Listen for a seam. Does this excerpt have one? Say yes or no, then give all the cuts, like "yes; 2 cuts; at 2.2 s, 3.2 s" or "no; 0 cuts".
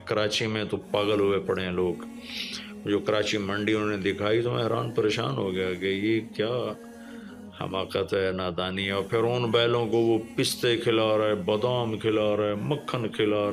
no; 0 cuts